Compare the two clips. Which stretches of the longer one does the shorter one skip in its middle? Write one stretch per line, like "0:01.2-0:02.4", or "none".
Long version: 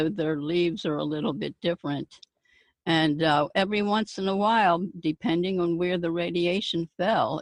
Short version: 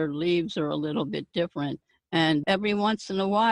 0:02.7-0:03.5